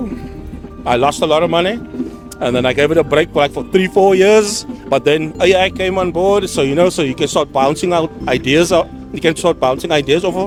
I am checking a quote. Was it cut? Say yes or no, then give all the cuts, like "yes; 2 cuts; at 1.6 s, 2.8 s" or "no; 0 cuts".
no; 0 cuts